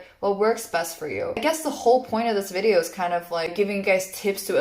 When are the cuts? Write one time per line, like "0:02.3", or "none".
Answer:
0:01.4
0:03.5